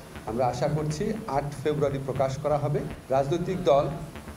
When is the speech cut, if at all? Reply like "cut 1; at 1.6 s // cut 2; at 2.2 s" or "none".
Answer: cut 1; at 2.9 s